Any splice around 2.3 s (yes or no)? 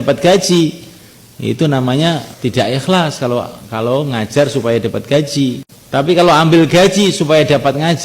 yes